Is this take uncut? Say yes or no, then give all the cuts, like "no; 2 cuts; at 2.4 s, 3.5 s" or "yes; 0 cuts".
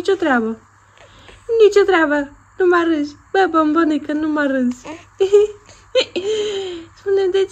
yes; 0 cuts